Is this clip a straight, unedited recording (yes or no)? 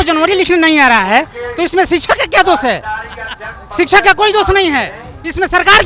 yes